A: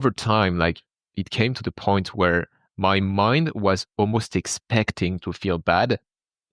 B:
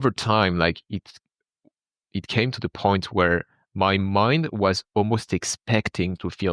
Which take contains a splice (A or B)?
A